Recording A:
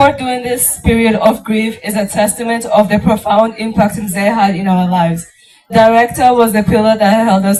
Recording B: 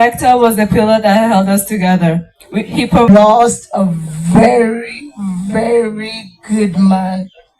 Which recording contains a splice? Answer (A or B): B